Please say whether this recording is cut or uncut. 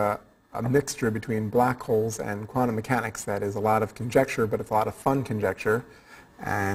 cut